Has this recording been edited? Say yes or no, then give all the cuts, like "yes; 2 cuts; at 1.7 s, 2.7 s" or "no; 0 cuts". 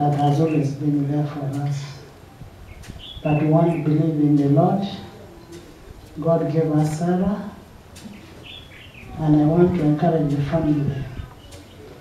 no; 0 cuts